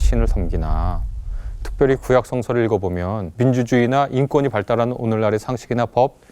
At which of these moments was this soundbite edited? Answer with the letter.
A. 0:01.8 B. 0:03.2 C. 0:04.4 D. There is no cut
B